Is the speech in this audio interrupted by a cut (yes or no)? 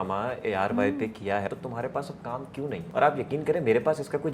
yes